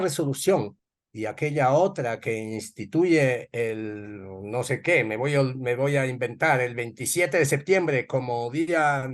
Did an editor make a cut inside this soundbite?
no; 0 cuts

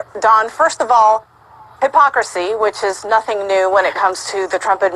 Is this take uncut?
no; 1 cut; at 3.0 s

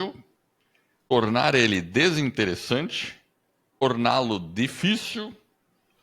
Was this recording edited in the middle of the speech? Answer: yes; 2 cuts; at 1.1 s, 3.8 s

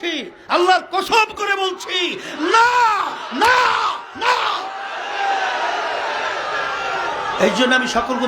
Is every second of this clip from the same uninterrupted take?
yes; 0 cuts

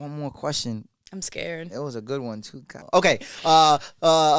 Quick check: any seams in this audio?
yes; 1 cut; at 2.7 s

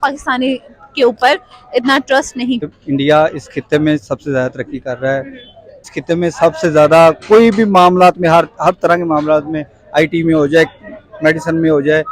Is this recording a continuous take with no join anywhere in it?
no; 2 cuts; at 2.6 s, 5.9 s

